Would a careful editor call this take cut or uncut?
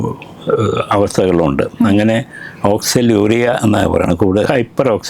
uncut